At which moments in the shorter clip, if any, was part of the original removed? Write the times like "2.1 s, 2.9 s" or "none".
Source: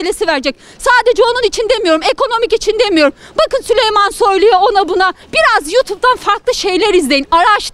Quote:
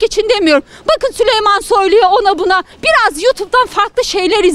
none